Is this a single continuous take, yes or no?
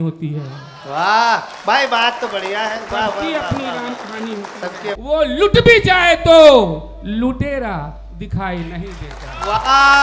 no